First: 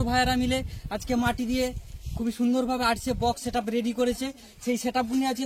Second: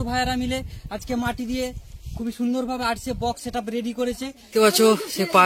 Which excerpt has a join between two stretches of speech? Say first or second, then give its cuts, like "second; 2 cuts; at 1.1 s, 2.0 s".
second; 1 cut; at 4.4 s